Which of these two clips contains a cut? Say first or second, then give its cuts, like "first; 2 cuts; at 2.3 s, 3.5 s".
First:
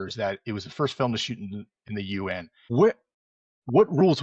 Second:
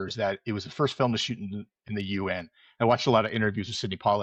first; 1 cut; at 2.6 s